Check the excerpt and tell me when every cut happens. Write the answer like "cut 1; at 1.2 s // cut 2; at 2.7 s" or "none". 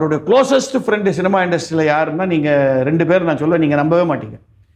none